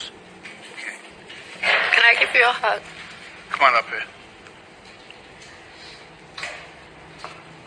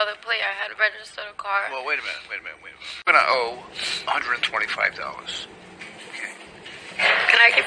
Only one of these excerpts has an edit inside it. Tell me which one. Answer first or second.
second